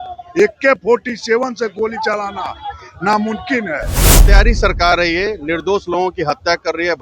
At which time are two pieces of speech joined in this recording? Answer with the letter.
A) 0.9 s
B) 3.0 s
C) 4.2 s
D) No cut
C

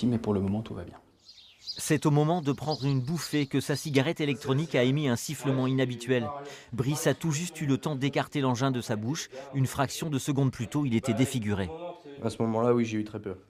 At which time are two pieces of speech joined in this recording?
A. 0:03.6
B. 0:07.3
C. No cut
C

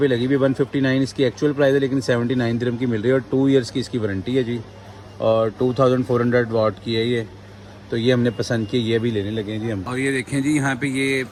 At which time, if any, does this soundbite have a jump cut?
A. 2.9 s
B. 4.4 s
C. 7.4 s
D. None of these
D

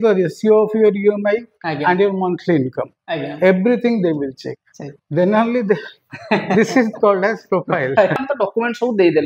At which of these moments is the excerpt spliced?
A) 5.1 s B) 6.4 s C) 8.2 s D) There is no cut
C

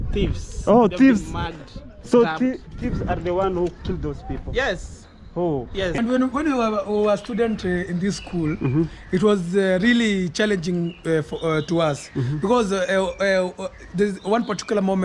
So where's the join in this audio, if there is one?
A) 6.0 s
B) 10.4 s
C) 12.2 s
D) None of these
A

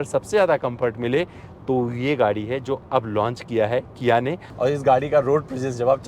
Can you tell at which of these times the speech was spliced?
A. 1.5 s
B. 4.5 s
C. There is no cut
B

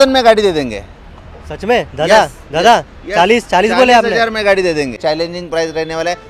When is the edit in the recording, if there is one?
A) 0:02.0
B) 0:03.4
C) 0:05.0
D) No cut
C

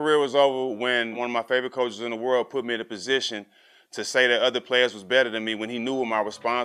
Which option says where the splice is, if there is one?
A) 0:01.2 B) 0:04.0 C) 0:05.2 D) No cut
A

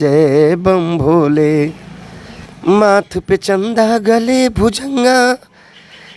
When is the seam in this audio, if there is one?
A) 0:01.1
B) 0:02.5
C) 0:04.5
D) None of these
D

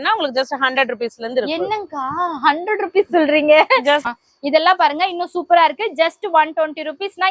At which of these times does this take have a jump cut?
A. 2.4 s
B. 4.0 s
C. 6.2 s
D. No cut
B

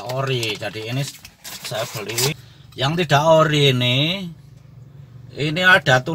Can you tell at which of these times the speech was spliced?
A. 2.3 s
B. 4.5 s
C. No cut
A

